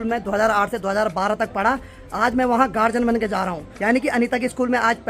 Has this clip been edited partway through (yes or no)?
no